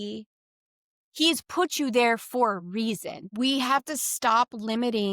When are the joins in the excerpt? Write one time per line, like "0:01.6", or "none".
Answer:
0:03.2